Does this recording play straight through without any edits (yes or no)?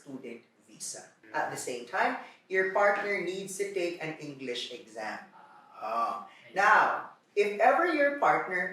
no